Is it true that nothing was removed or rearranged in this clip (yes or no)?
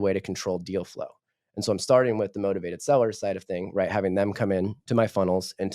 no